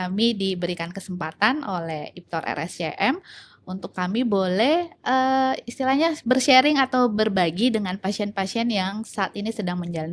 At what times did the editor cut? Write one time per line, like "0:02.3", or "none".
none